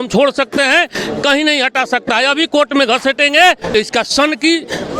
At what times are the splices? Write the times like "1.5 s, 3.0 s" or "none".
3.6 s